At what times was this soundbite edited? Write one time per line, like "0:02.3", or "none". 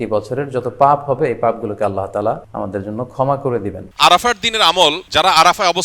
0:02.5
0:03.8
0:05.0